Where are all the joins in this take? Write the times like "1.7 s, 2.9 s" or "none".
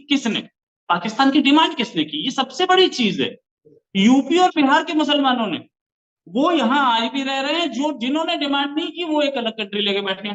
none

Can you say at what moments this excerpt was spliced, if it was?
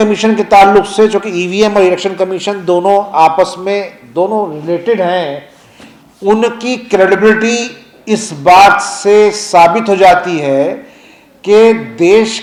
none

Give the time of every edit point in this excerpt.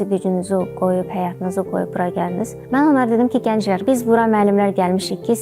2.6 s, 3.8 s

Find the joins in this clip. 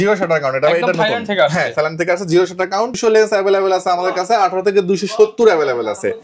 3.0 s

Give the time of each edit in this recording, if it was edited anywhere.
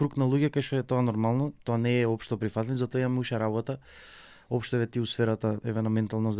none

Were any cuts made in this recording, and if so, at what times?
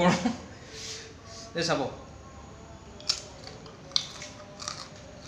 none

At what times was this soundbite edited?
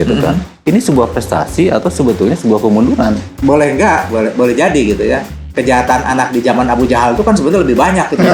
3.3 s

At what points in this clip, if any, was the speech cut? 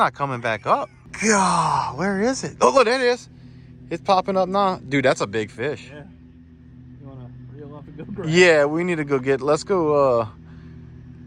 1.0 s

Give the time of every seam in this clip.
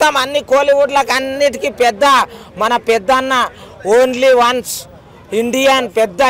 none

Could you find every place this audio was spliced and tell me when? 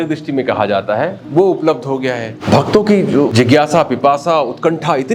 2.3 s, 3.3 s

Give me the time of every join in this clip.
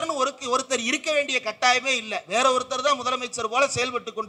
none

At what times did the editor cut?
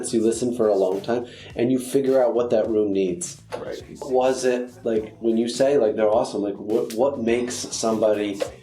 4.1 s

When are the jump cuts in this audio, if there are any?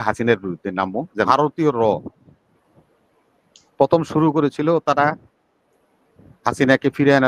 1.3 s

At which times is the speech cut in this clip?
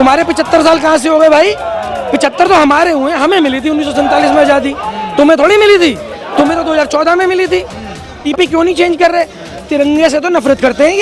8.2 s

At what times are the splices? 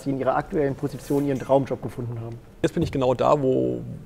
2.6 s

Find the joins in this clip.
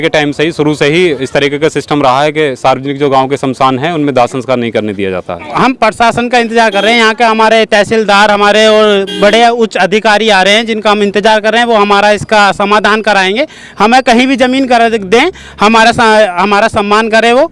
5.4 s

